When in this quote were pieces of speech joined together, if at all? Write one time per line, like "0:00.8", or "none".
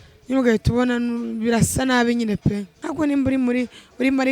0:02.8